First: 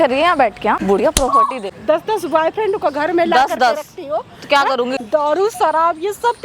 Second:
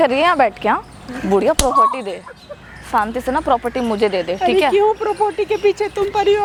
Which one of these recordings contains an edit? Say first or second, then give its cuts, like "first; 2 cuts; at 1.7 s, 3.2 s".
first; 3 cuts; at 0.8 s, 1.7 s, 5.0 s